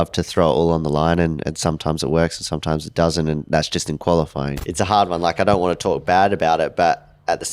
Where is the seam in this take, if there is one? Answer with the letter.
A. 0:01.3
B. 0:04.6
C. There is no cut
B